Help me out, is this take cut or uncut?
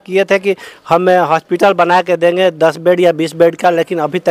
uncut